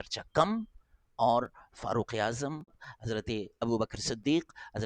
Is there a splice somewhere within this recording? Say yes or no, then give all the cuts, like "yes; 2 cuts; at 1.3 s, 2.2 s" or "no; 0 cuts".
yes; 1 cut; at 2.8 s